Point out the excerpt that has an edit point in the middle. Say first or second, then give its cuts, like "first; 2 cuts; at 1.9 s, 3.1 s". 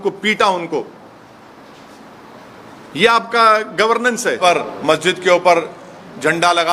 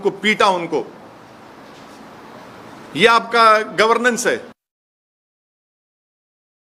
first; 1 cut; at 4.4 s